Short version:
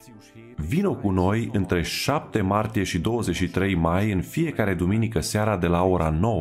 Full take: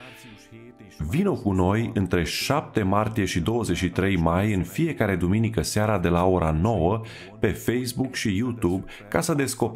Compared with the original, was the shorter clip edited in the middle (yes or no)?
no